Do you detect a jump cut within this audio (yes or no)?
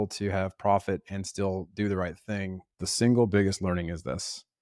yes